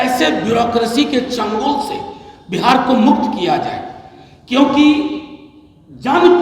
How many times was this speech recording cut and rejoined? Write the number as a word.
zero